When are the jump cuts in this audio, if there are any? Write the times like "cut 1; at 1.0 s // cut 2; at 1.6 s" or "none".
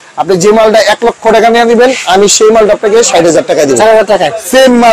none